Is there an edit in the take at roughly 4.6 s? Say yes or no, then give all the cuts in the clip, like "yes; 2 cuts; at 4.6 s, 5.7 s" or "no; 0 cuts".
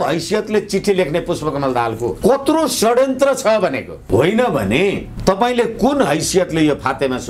no; 0 cuts